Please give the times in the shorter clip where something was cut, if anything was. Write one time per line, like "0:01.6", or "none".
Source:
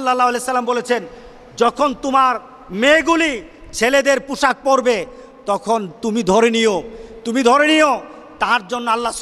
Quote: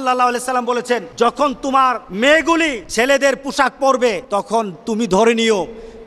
0:01.1
0:02.1
0:02.8
0:04.2